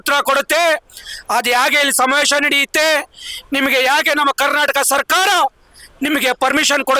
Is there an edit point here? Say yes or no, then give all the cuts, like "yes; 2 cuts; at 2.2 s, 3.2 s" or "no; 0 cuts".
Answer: no; 0 cuts